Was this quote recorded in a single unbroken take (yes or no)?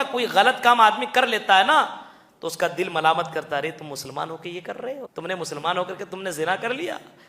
no